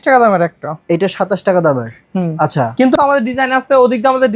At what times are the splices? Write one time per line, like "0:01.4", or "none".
0:03.0